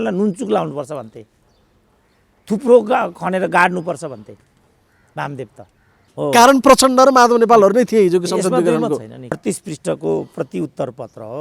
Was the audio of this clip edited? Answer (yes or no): yes